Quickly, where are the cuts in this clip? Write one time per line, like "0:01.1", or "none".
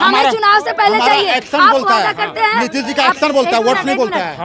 none